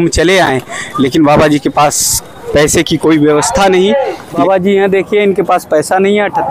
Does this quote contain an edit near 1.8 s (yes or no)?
no